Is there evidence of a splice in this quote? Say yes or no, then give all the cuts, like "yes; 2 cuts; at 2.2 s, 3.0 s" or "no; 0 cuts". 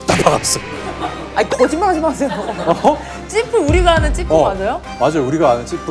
no; 0 cuts